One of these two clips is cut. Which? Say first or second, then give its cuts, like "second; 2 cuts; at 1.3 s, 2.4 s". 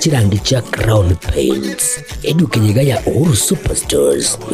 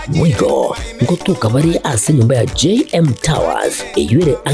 second; 1 cut; at 2.5 s